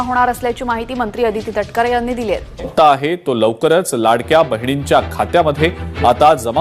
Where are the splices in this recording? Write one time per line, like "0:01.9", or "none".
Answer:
0:02.6